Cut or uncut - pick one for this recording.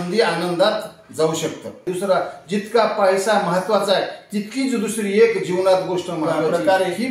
cut